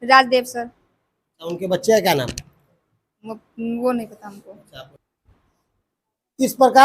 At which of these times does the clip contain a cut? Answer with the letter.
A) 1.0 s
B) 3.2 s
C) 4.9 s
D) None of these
C